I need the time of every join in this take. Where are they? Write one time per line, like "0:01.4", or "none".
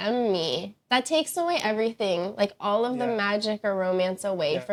none